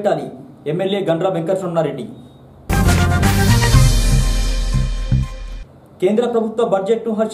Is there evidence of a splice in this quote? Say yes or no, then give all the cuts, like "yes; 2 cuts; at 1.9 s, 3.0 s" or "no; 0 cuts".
no; 0 cuts